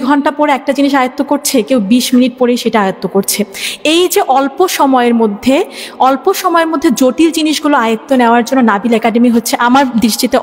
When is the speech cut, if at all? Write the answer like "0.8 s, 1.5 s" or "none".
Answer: none

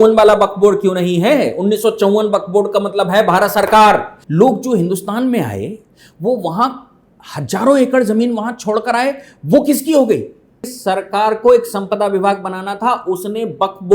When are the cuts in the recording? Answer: 4.2 s, 10.7 s

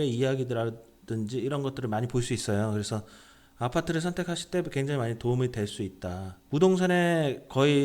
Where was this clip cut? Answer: 6.4 s

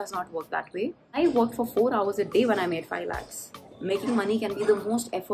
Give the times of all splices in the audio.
1.1 s, 3.5 s

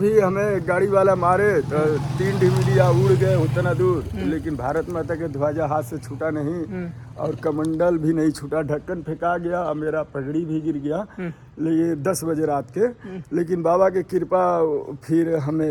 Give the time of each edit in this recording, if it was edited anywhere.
none

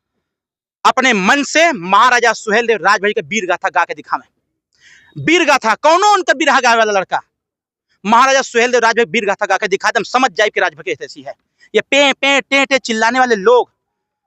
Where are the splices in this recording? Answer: 9.6 s

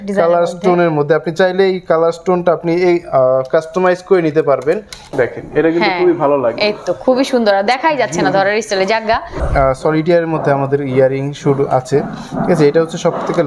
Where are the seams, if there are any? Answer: 5.0 s, 9.4 s

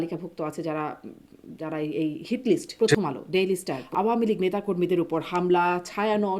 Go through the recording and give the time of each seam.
2.8 s, 3.8 s

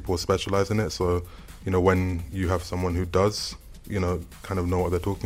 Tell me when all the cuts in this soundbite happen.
none

